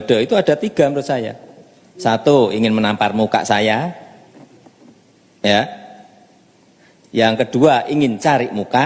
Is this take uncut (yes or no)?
yes